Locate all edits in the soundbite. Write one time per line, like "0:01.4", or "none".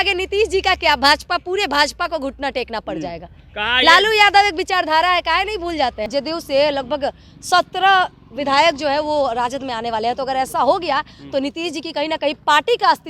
0:06.0